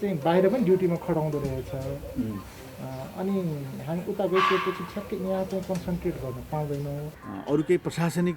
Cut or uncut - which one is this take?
cut